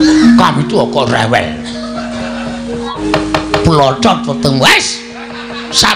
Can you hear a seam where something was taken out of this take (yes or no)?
yes